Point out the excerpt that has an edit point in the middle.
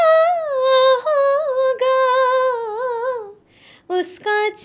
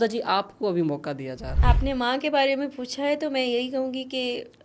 second; 1 cut; at 1.4 s

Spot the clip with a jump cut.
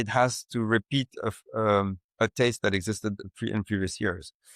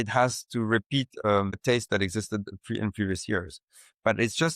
second; 1 cut; at 1.6 s

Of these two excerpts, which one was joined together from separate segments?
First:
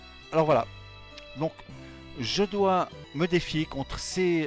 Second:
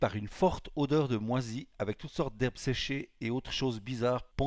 first; 1 cut; at 2.9 s

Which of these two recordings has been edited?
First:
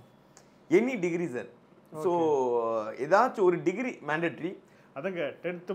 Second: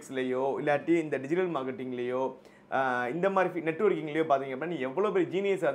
first; 1 cut; at 4.8 s

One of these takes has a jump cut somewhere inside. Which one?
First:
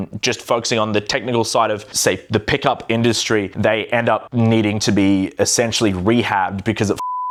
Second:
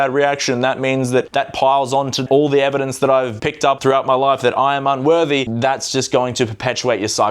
second; 2 cuts; at 3.7 s, 5.5 s

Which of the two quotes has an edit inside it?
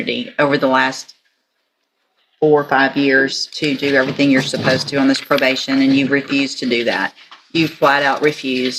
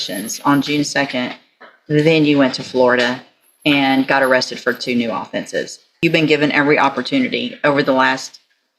second; 1 cut; at 6.0 s

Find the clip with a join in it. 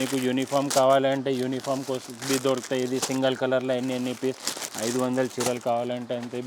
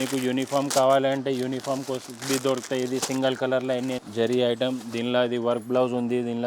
second; 1 cut; at 4.0 s

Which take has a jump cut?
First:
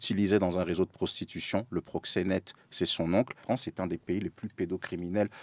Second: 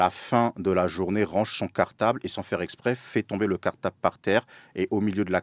first; 1 cut; at 3.4 s

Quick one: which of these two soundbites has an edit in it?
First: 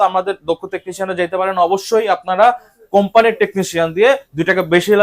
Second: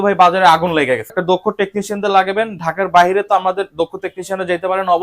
second; 1 cut; at 1.1 s

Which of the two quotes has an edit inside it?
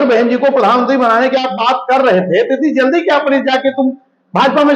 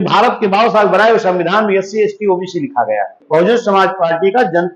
second; 1 cut; at 3.2 s

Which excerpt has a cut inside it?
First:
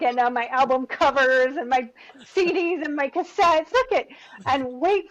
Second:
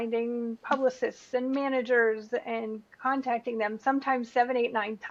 first; 1 cut; at 3.7 s

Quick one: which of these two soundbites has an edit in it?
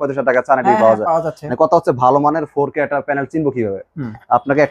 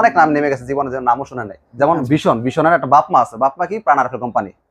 second; 1 cut; at 1.6 s

